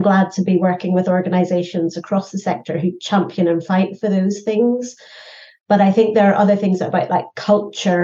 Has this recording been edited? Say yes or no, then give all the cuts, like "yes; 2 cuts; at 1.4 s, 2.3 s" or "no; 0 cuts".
no; 0 cuts